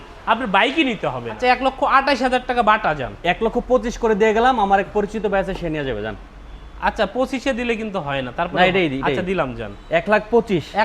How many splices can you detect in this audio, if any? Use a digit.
1